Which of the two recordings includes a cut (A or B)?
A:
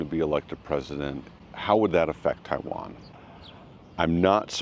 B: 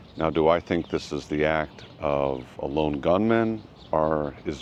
A